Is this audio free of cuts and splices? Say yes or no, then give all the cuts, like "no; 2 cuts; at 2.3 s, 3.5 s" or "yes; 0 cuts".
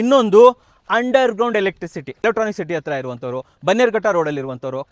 no; 1 cut; at 2.1 s